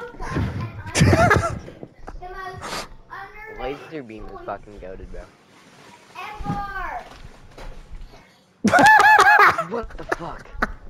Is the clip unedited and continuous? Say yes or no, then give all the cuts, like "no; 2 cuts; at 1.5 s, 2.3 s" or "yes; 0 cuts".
yes; 0 cuts